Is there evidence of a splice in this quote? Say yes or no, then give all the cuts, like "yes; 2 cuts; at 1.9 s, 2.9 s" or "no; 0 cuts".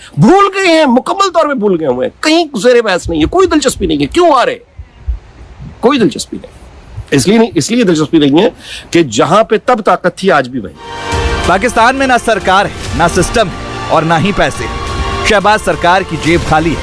no; 0 cuts